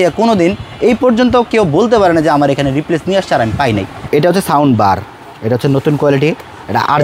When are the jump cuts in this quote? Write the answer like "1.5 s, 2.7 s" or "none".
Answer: 4.0 s